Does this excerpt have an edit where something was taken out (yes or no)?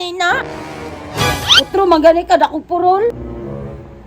yes